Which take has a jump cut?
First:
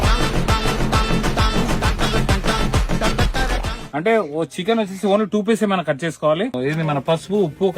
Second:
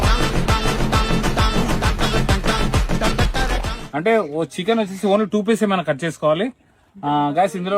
first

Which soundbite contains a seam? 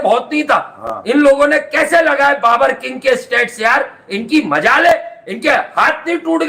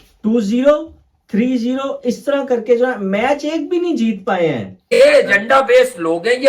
second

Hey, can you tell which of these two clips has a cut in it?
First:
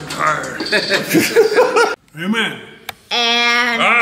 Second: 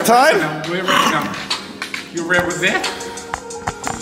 first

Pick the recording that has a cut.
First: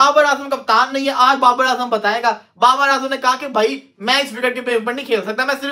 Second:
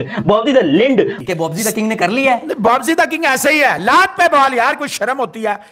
second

